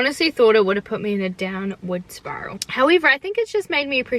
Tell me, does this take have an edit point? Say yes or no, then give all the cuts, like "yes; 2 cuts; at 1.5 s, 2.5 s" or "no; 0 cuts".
no; 0 cuts